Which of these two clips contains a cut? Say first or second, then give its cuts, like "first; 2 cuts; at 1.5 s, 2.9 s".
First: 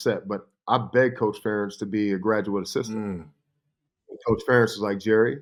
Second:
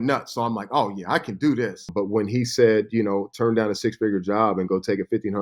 second; 1 cut; at 1.7 s